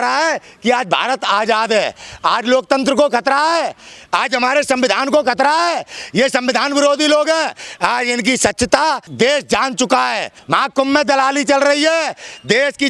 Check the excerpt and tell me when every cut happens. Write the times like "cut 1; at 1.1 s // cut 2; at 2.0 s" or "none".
cut 1; at 7.6 s // cut 2; at 9.1 s // cut 3; at 10.3 s